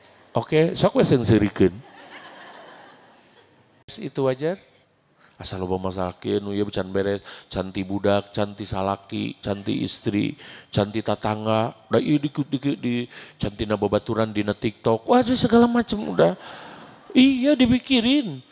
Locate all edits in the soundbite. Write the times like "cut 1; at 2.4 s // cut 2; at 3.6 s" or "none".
cut 1; at 4.0 s